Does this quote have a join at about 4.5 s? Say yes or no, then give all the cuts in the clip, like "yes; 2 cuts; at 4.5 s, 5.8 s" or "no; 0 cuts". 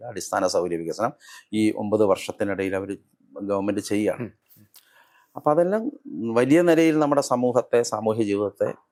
no; 0 cuts